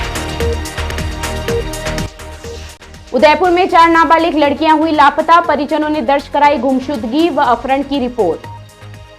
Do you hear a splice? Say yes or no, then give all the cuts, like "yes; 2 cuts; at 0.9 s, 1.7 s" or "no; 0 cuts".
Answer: yes; 1 cut; at 2.0 s